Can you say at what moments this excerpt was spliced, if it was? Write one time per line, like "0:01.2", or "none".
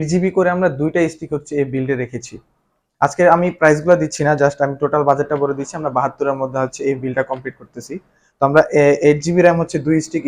none